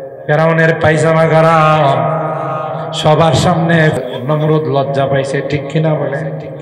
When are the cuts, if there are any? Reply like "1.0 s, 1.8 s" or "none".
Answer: 4.0 s